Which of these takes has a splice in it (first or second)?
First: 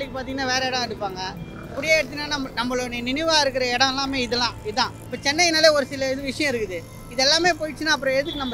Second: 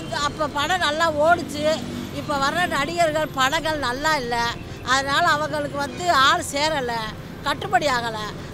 first